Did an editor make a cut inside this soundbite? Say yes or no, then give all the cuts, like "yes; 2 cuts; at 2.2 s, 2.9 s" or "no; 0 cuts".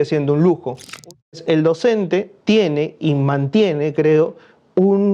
yes; 2 cuts; at 1.1 s, 2.3 s